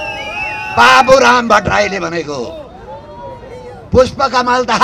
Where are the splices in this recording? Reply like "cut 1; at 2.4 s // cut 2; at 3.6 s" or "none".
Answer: none